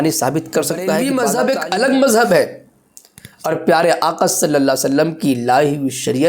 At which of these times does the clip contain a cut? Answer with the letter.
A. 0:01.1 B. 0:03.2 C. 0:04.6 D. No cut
A